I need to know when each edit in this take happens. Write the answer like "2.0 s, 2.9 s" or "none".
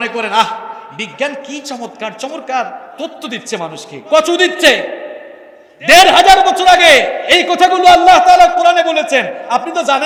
none